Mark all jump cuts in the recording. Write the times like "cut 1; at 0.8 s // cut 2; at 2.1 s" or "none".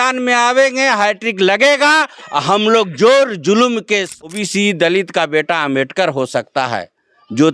cut 1; at 4.3 s

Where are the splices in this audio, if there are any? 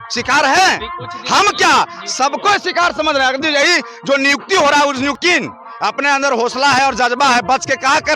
cut 1; at 5.2 s

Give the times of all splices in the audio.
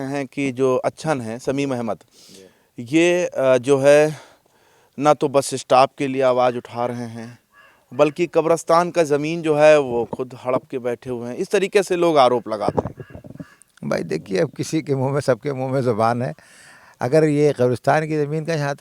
none

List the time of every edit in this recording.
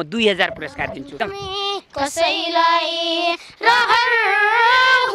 cut 1; at 1.1 s

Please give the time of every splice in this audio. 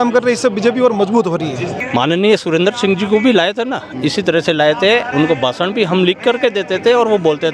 cut 1; at 1.7 s

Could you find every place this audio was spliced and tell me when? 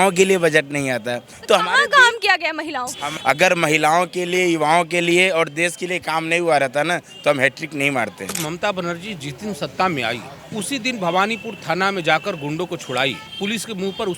cut 1; at 3.0 s // cut 2; at 8.4 s // cut 3; at 10.3 s // cut 4; at 13.3 s

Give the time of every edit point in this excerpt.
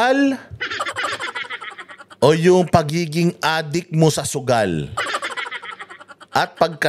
none

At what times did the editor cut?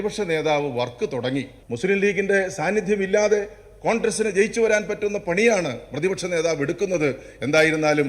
cut 1; at 1.6 s

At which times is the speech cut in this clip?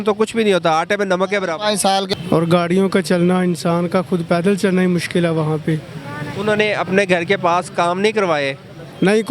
cut 1; at 2.1 s

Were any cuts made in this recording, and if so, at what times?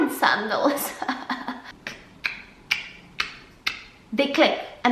cut 1; at 1.6 s

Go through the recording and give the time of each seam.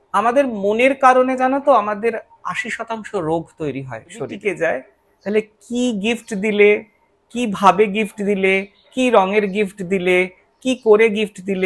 cut 1; at 4.4 s

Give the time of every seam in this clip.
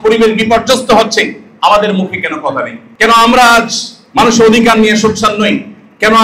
cut 1; at 2.8 s

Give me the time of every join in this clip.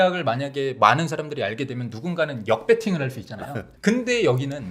none

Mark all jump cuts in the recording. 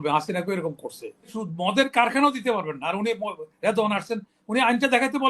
cut 1; at 1.4 s

